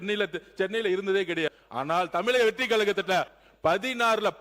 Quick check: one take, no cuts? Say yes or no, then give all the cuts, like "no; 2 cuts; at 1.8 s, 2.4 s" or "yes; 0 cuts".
no; 2 cuts; at 1.6 s, 3.4 s